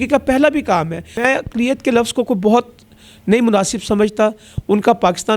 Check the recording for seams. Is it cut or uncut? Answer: cut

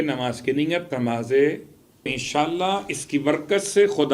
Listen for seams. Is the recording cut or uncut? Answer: cut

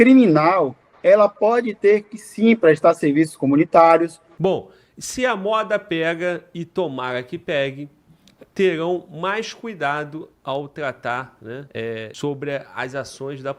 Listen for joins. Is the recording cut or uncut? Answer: cut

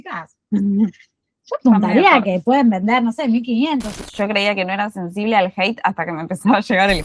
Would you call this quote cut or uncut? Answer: cut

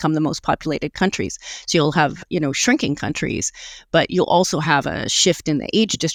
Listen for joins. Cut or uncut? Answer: uncut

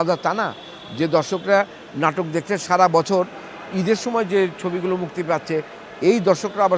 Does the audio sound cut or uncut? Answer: uncut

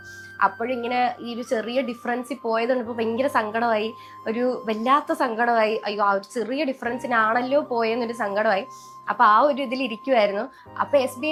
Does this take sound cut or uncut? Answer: uncut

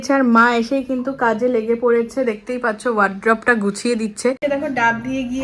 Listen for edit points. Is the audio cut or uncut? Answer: cut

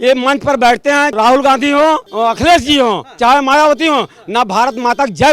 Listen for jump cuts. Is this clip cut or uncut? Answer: cut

